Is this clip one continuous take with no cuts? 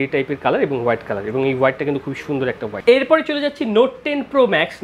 yes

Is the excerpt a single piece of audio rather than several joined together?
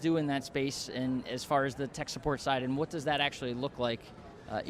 yes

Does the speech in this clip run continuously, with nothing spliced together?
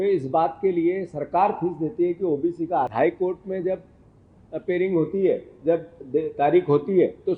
no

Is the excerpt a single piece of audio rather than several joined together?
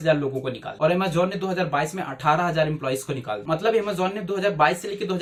yes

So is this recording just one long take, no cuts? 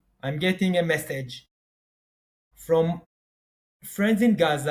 yes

